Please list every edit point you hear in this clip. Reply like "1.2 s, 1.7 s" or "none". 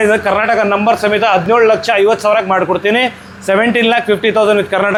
none